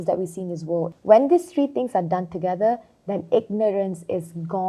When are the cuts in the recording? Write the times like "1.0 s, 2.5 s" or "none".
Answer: 0.9 s